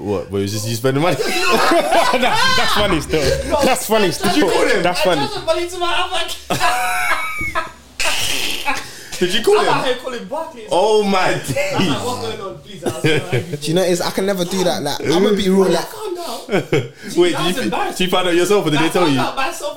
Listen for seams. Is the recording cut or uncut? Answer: uncut